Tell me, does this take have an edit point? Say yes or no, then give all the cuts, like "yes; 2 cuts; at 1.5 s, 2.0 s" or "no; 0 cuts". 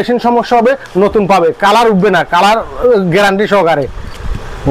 no; 0 cuts